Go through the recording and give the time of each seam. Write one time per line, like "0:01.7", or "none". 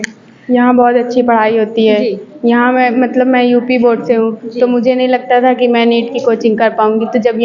none